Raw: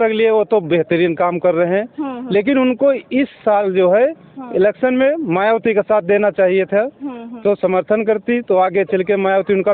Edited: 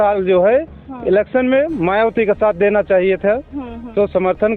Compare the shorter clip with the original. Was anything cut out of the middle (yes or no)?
no